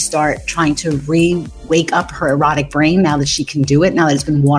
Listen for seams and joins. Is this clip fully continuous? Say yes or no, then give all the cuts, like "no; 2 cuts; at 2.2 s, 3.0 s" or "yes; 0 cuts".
no; 1 cut; at 1.5 s